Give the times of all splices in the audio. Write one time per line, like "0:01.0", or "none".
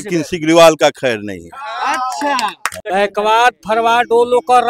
0:02.7